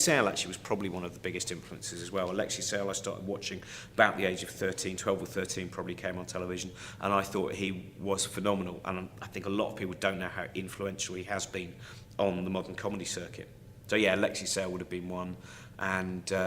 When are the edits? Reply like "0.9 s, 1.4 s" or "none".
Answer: 6.5 s